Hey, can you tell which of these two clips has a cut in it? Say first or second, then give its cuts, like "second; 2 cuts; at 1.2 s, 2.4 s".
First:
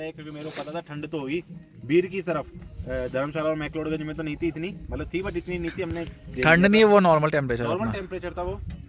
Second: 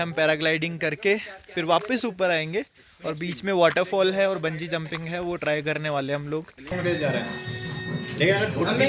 second; 1 cut; at 6.7 s